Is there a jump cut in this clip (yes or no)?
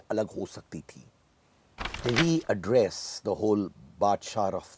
yes